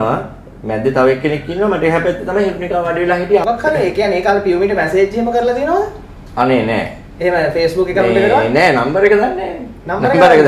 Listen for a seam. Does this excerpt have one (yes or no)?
yes